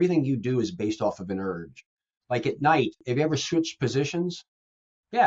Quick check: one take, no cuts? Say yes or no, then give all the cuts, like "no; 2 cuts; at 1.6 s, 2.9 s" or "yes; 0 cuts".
no; 1 cut; at 3.0 s